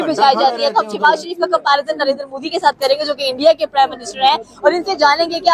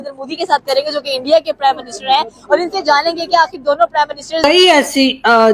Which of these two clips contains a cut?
second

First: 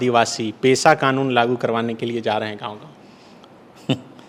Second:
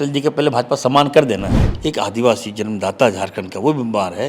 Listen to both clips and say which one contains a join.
second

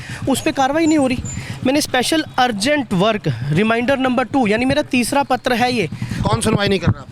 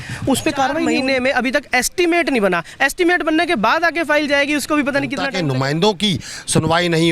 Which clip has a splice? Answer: second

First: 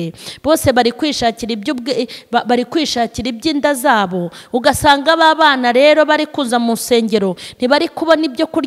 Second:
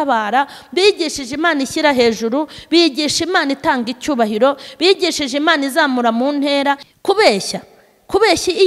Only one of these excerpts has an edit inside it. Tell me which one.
second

